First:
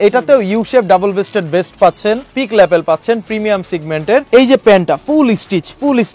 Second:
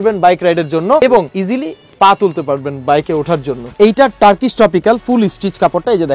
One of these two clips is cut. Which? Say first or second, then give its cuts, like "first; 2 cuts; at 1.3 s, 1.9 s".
second; 2 cuts; at 1.0 s, 3.7 s